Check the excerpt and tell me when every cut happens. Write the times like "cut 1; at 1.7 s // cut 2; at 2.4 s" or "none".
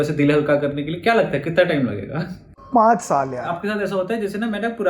cut 1; at 3.5 s